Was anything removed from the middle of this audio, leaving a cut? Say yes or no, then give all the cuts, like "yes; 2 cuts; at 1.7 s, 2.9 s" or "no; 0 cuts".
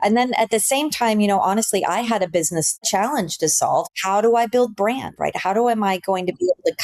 yes; 2 cuts; at 2.8 s, 3.9 s